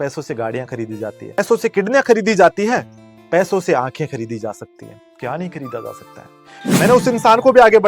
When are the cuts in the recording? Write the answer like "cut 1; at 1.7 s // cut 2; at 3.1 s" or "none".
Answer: cut 1; at 1.4 s // cut 2; at 6.7 s